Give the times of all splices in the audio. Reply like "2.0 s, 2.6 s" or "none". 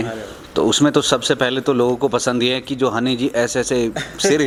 none